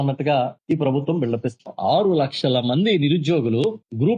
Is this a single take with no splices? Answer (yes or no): yes